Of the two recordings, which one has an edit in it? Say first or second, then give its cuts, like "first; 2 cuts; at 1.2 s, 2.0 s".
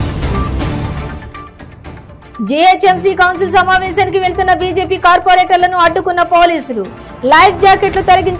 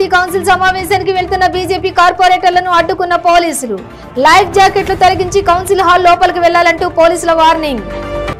first; 1 cut; at 1.5 s